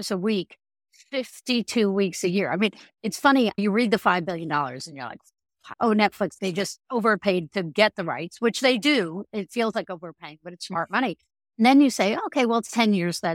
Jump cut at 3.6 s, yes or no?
yes